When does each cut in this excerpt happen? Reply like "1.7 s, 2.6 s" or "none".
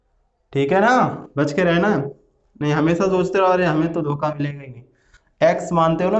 none